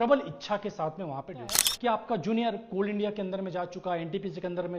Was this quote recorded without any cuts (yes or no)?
no